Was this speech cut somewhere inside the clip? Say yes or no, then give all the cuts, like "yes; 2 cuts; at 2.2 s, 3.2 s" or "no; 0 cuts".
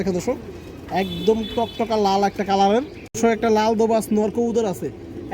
yes; 1 cut; at 3.1 s